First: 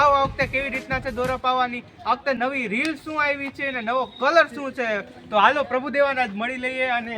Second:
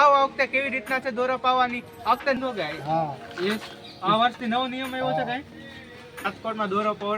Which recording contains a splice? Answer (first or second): second